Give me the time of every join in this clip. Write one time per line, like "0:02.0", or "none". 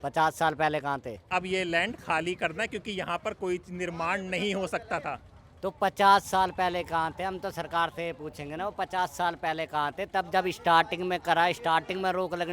0:01.3

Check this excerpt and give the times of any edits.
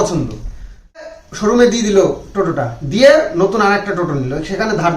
0:01.0

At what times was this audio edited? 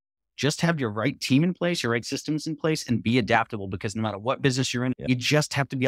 0:05.0

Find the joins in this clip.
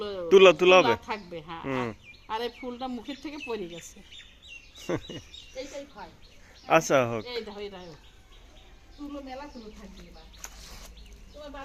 none

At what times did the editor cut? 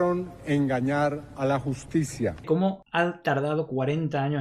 0:02.5

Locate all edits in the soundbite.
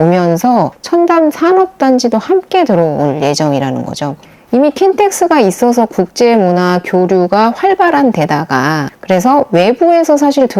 0:04.2

